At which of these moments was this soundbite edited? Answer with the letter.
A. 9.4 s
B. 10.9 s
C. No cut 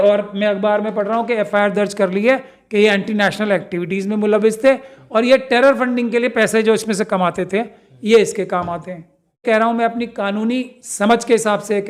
A